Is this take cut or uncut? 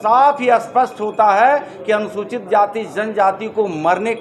uncut